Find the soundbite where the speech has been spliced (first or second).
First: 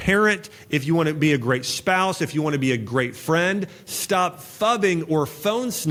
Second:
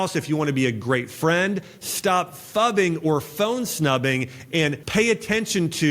second